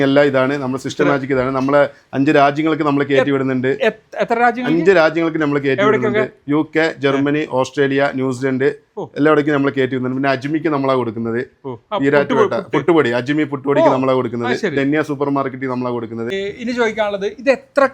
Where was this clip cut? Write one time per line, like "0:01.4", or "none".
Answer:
none